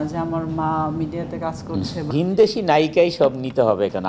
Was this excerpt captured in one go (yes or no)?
no